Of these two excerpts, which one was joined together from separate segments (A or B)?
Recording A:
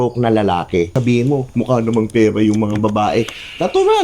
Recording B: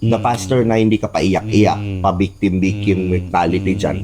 A